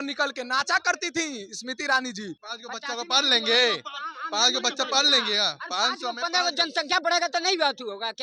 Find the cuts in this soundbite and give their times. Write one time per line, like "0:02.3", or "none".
0:02.5